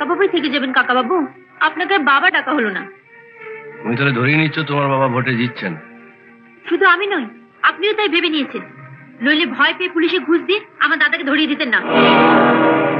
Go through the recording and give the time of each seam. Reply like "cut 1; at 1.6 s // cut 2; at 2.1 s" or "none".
none

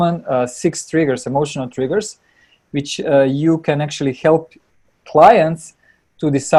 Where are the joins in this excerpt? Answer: none

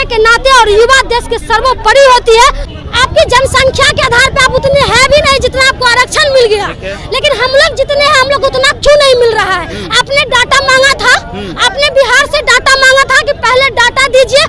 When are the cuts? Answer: cut 1; at 2.7 s

